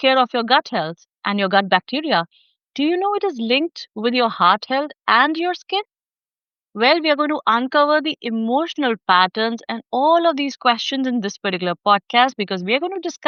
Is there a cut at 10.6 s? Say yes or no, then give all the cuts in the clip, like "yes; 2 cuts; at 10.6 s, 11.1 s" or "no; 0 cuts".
no; 0 cuts